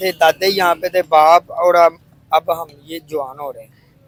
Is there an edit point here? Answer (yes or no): no